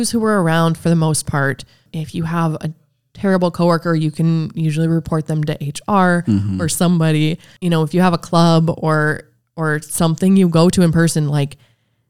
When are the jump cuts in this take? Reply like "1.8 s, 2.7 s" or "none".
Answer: 1.8 s, 7.5 s